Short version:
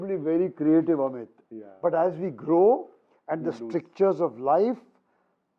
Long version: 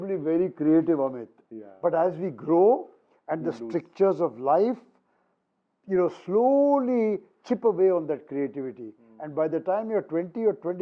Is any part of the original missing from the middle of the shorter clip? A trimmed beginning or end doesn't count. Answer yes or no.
no